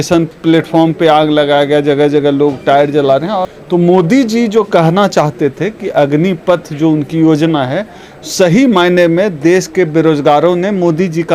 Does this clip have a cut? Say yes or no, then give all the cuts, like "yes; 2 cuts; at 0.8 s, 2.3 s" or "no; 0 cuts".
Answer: yes; 1 cut; at 3.6 s